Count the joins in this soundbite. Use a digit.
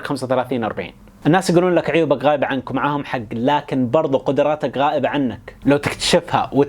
1